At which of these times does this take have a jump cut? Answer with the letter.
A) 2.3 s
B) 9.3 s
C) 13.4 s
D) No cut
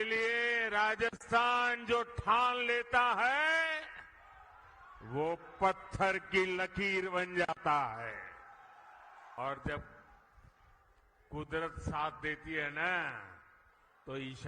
B